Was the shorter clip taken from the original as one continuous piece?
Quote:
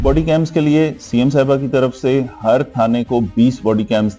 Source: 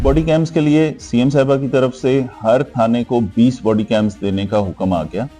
yes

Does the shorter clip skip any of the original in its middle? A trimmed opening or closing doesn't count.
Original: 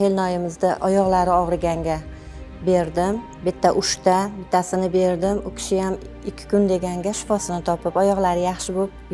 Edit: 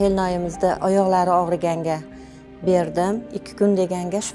yes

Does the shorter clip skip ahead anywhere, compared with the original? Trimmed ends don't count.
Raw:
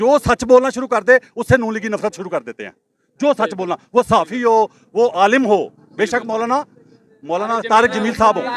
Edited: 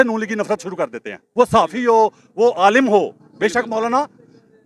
yes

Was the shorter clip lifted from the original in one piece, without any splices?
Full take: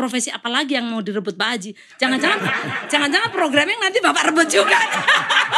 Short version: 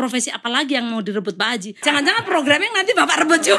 no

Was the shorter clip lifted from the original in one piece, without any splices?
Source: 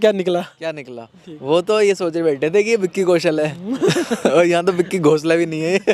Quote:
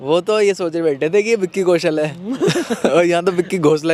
yes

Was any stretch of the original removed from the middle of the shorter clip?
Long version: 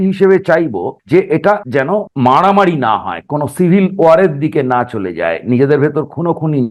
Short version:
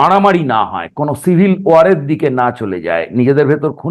no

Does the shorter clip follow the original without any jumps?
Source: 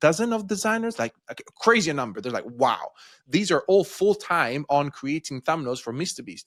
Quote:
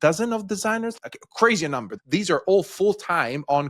no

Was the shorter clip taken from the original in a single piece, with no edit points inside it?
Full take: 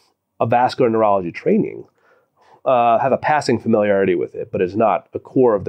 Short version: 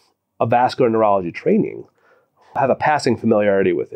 no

